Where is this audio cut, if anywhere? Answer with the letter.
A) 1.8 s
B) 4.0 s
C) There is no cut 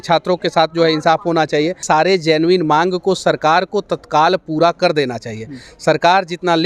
A